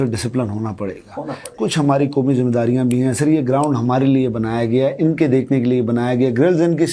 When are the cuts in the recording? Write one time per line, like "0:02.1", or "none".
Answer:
none